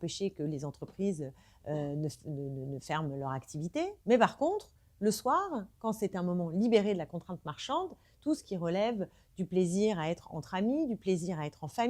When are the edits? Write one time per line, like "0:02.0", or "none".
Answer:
0:04.0